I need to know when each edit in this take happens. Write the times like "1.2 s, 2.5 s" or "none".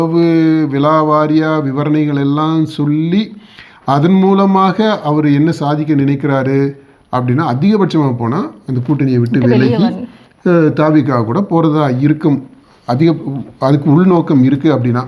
none